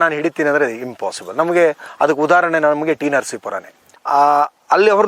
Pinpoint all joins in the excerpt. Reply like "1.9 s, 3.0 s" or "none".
3.9 s